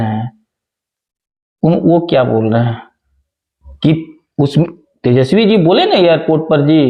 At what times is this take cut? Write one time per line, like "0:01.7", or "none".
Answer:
none